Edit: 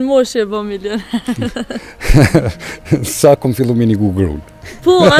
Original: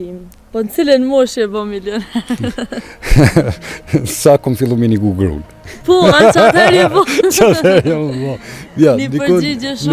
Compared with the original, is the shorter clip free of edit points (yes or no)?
yes